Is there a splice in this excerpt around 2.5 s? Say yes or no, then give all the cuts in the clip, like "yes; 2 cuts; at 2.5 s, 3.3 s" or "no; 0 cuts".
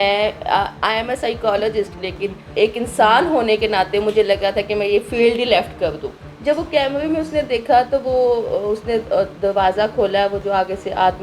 yes; 2 cuts; at 2.5 s, 6.2 s